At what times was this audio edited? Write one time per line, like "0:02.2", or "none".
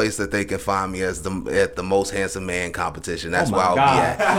none